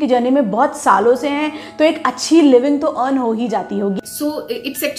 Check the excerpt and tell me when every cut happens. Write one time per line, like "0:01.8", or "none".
0:04.0